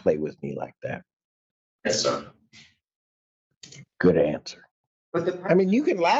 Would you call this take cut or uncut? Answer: cut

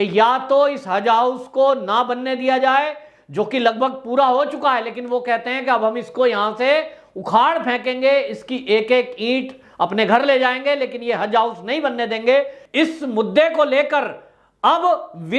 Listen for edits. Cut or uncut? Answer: cut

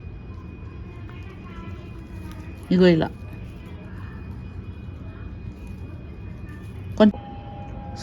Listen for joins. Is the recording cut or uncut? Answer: cut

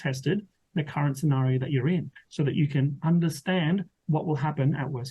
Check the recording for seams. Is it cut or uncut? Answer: cut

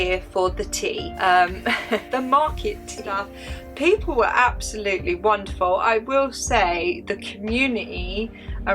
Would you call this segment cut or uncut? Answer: cut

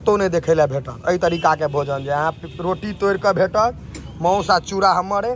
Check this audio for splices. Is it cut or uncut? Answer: uncut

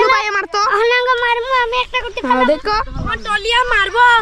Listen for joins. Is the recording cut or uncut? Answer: uncut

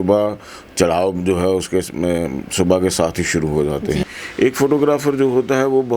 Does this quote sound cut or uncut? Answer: cut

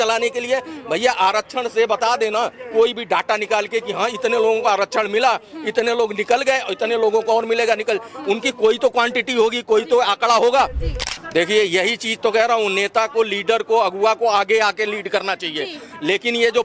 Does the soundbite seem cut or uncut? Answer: cut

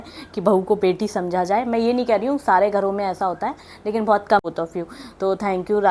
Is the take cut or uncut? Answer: cut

